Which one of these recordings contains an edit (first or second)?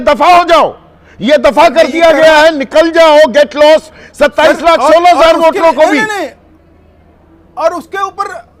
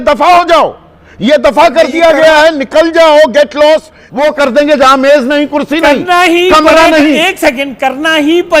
second